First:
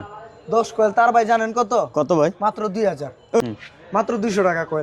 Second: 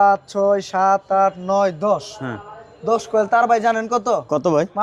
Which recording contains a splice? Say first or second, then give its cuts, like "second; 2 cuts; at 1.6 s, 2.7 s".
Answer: first; 1 cut; at 3.4 s